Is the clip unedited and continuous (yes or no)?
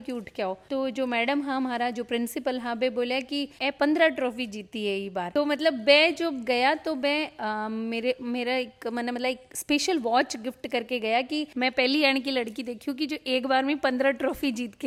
yes